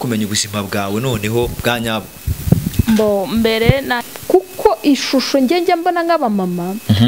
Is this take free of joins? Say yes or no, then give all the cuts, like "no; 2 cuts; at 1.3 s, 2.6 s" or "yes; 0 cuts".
no; 1 cut; at 4.1 s